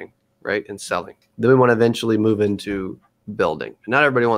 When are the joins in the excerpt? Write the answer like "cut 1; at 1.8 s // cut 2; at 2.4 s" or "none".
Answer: cut 1; at 1.2 s